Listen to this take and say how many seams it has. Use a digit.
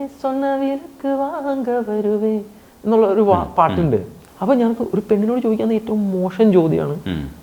1